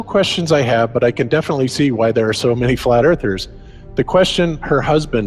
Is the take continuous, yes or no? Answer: no